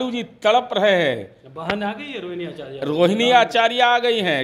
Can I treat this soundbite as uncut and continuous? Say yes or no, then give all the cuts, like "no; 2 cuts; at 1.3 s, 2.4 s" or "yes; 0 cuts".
yes; 0 cuts